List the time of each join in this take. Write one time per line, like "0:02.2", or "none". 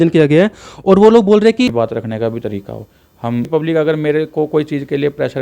0:01.7
0:03.5